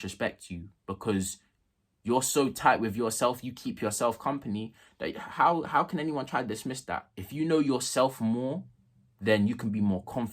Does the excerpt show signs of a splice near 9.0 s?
no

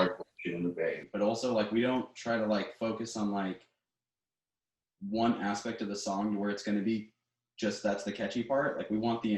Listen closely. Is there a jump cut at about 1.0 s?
yes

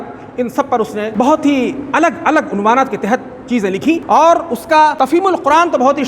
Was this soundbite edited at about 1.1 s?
yes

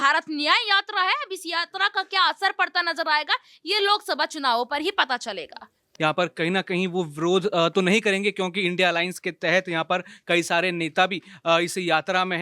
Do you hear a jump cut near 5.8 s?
yes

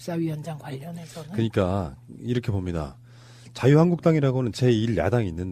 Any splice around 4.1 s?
yes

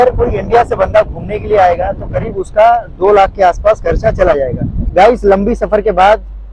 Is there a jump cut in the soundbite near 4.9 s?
yes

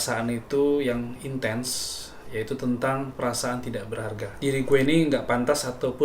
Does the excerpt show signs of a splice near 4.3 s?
yes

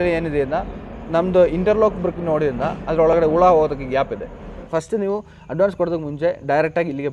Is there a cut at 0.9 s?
no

